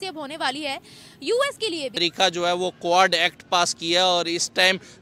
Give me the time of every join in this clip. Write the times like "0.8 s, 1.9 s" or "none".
2.0 s